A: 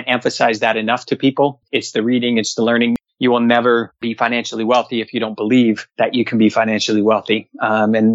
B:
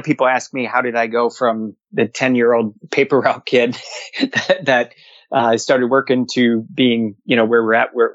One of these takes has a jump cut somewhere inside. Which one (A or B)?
A